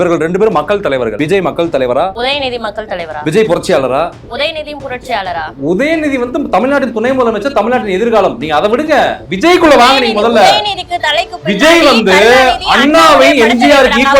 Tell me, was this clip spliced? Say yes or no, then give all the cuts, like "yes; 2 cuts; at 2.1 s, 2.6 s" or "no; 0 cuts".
yes; 2 cuts; at 1.2 s, 2.1 s